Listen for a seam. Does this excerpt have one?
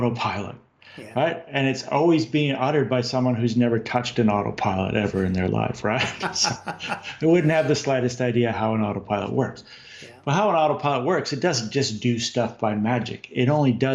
no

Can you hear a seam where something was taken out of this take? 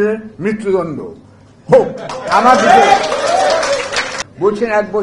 yes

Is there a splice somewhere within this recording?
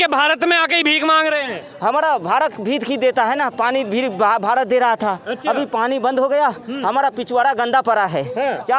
no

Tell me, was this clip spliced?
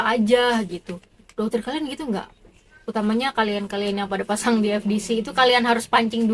no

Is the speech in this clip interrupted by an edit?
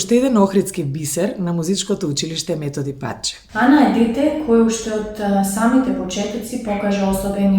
yes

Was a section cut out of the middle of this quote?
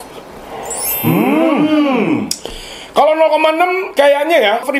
no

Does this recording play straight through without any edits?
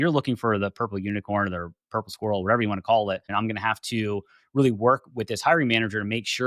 no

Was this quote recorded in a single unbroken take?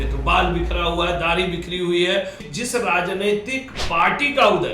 no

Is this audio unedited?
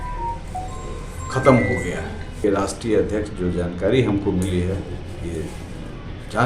no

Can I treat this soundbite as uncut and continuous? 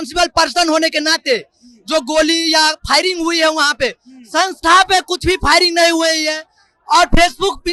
yes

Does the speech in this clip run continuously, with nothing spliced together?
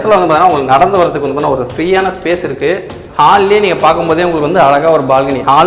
no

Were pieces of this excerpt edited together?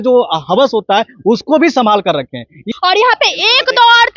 yes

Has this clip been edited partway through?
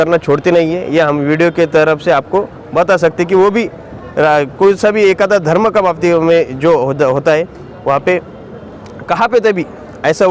no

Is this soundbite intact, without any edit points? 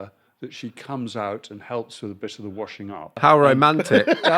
no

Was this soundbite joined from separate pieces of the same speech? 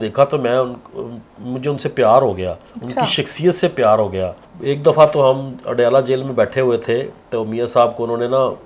no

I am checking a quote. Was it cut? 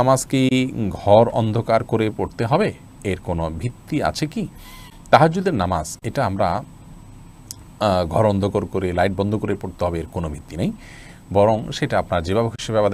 no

